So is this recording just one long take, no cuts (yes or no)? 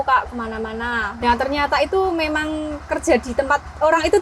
no